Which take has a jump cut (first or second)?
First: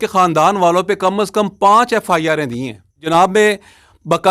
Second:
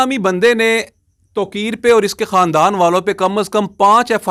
first